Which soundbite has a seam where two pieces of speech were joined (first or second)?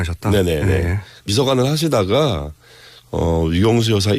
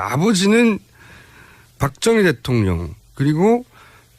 first